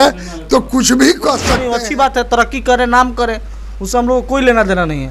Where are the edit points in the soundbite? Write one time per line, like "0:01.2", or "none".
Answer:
0:01.6